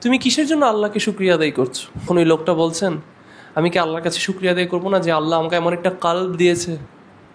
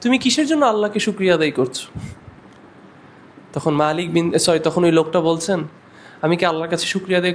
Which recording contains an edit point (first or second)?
first